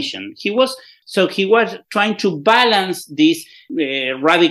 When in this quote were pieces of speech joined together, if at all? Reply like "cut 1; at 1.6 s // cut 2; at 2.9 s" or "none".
cut 1; at 1.0 s // cut 2; at 3.6 s